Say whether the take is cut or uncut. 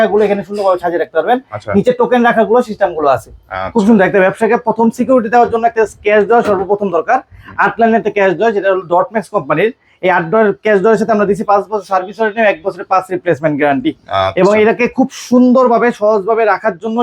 uncut